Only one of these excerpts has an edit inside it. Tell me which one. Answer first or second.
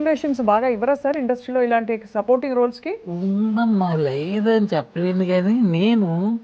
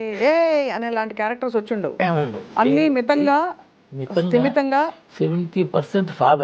second